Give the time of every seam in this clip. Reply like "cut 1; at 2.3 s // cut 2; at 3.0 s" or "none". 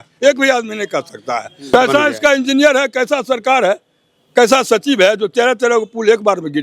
cut 1; at 1.7 s